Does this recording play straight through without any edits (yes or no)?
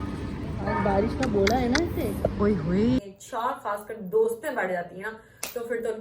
no